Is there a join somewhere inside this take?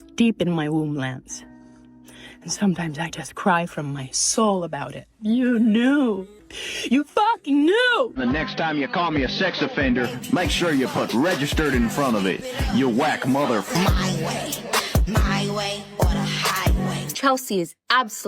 yes; 3 cuts; at 5.1 s, 8.2 s, 17.1 s

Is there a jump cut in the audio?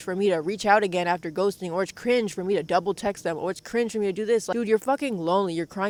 no; 0 cuts

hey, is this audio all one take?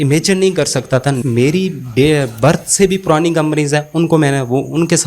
no; 1 cut; at 1.2 s

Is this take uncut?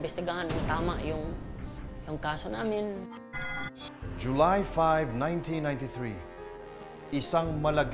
yes; 0 cuts

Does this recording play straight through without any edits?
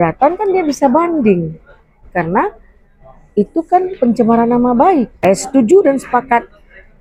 no; 1 cut; at 5.1 s

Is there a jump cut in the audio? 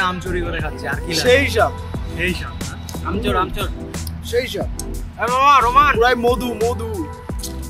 no; 0 cuts

